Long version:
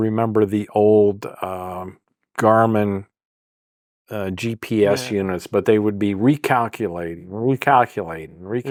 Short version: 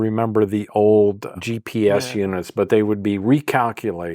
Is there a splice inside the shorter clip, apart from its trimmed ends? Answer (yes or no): yes